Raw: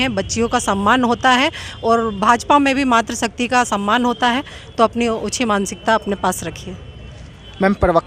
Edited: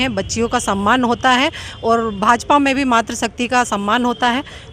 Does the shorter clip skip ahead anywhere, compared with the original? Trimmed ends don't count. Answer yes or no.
no